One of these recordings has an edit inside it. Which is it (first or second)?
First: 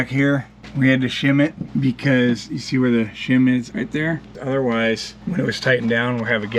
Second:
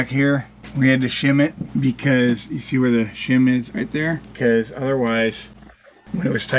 first